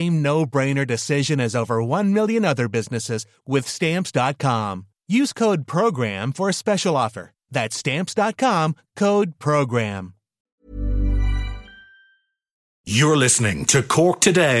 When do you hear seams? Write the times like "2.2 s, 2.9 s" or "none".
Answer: 12.8 s